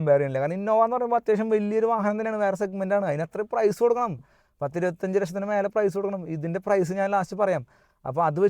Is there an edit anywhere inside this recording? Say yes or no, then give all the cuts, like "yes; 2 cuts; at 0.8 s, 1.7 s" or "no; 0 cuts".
no; 0 cuts